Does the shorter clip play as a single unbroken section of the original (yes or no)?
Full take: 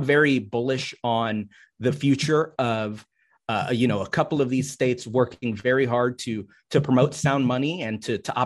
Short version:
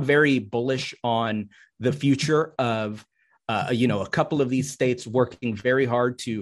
yes